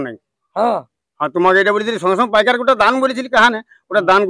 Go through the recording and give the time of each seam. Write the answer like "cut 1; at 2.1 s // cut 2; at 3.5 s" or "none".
none